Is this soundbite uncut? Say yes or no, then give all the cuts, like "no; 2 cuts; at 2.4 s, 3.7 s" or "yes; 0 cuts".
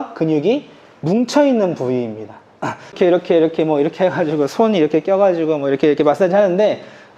no; 1 cut; at 2.9 s